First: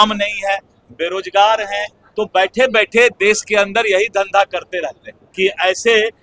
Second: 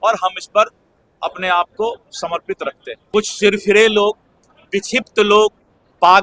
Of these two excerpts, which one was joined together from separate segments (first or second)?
first